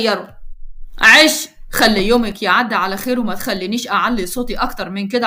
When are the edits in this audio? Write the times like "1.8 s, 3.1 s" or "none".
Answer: none